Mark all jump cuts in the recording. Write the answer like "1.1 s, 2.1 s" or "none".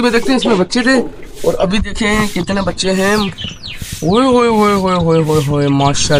none